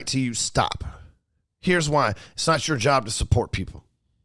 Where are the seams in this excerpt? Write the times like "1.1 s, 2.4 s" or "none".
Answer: none